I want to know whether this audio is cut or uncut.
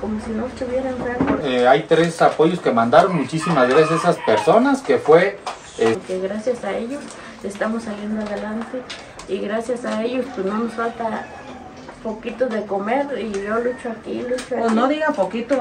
cut